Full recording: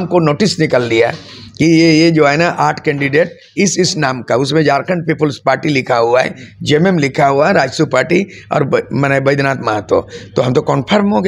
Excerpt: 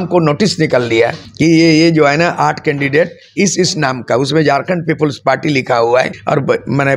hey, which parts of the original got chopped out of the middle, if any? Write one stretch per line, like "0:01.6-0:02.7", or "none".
0:01.2-0:01.4
0:06.4-0:08.4